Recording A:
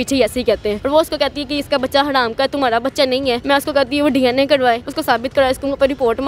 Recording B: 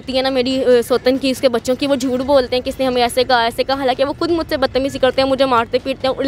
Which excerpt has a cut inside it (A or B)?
A